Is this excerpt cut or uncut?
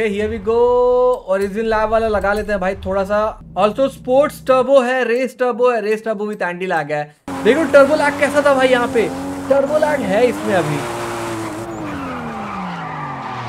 cut